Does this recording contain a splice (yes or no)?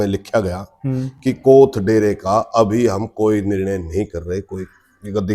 no